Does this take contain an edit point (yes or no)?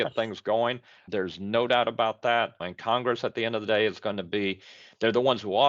yes